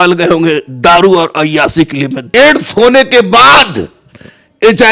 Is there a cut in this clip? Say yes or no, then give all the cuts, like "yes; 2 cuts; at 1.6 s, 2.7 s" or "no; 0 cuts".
yes; 1 cut; at 2.2 s